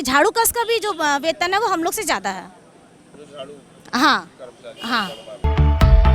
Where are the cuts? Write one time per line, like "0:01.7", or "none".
none

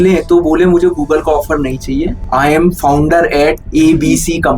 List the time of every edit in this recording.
0:02.2
0:03.6

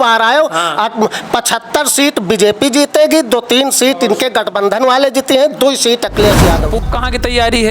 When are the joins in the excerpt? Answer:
0:06.8

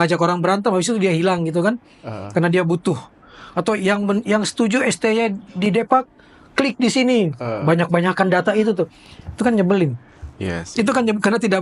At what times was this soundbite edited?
none

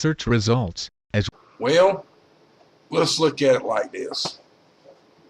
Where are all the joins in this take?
none

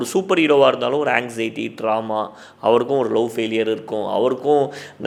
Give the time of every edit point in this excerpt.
none

